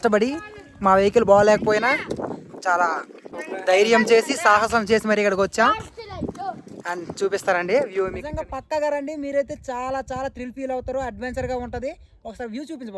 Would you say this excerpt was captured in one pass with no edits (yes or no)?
no